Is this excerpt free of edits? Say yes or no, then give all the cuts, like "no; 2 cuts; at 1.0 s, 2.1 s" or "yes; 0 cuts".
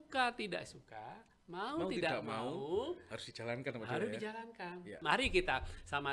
no; 1 cut; at 5.0 s